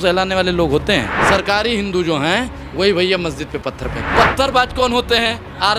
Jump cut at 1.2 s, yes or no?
yes